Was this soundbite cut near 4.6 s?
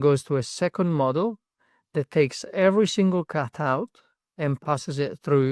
yes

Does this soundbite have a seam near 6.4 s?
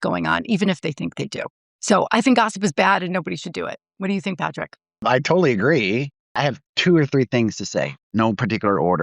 yes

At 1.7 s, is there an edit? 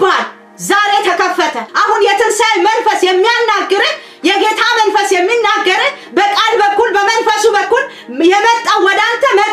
yes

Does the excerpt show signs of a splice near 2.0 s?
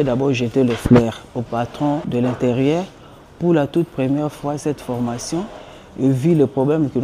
yes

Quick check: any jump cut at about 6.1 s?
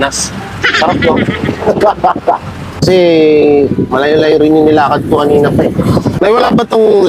yes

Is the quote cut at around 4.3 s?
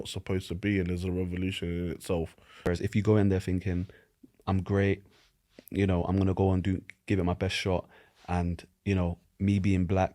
no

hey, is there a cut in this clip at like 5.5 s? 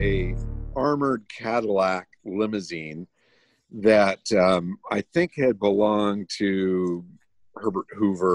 no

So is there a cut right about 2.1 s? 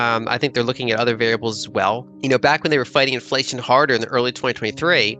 yes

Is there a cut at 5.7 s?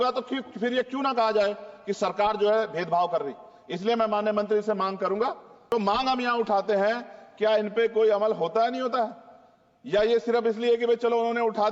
yes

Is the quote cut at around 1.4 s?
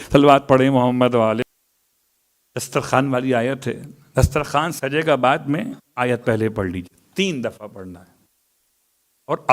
yes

